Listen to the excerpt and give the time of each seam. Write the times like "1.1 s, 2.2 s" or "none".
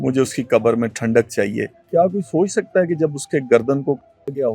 1.8 s